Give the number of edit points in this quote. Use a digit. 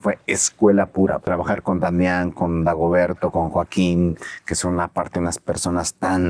1